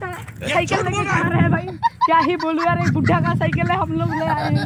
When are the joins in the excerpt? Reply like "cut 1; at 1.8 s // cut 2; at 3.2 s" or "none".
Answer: none